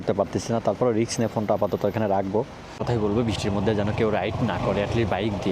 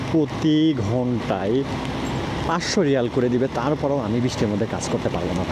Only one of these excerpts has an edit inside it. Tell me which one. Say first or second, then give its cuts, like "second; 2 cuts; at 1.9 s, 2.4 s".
first; 1 cut; at 2.8 s